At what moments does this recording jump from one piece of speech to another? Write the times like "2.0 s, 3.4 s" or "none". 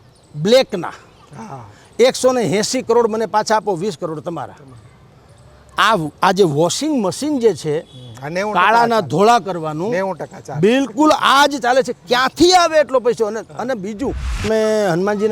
14.4 s